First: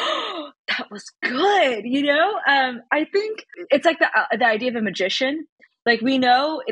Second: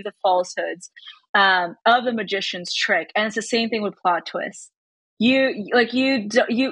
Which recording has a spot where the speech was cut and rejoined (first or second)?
first